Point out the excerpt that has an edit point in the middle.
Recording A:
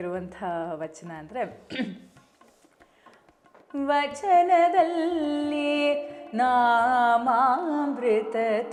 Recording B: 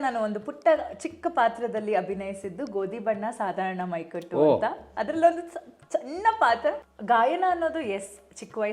B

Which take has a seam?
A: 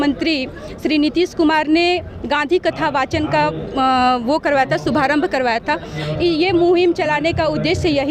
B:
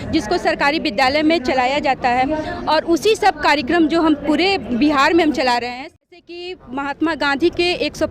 B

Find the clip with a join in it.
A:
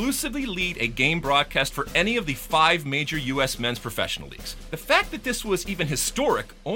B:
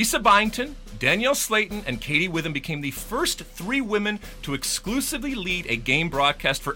A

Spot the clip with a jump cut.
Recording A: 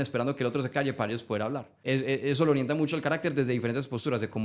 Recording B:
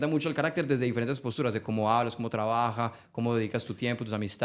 A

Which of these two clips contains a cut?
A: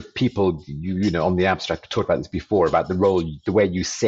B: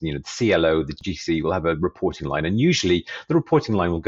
B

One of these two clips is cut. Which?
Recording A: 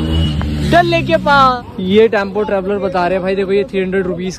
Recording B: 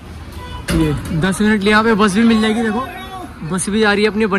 A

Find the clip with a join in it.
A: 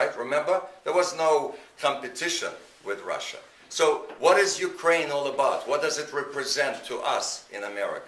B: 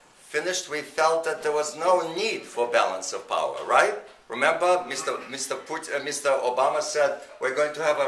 A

